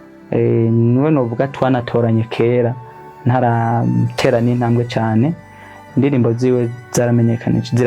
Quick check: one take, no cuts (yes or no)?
yes